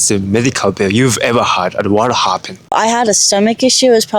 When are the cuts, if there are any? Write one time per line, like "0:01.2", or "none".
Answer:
0:02.7